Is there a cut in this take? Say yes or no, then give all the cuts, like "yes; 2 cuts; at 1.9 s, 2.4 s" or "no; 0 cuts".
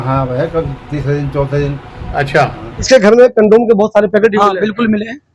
yes; 1 cut; at 2.9 s